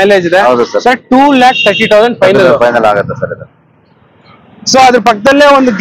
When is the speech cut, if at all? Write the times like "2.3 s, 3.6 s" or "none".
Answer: none